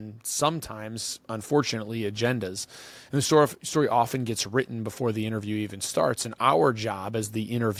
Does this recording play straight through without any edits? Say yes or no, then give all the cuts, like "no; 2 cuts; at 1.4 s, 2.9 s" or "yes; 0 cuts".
yes; 0 cuts